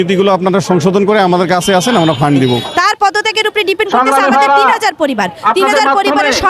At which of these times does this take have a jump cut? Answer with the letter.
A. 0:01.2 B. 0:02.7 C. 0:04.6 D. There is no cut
B